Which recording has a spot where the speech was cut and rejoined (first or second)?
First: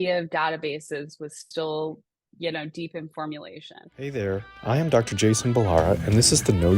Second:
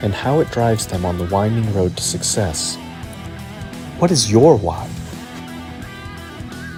first